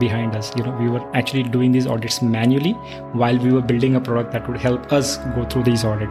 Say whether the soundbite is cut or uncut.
uncut